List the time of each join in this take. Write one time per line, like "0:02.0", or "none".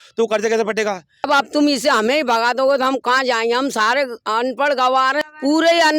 0:01.1
0:05.2